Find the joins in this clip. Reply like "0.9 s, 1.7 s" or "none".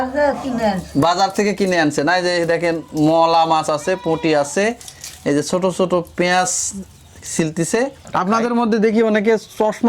8.0 s